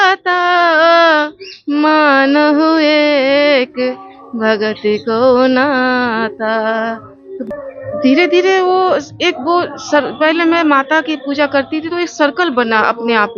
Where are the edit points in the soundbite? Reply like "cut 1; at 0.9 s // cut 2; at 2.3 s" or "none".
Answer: cut 1; at 7.4 s